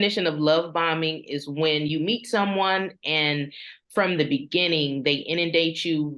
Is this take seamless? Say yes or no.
yes